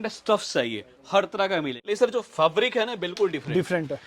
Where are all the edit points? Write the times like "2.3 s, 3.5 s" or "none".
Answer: 1.8 s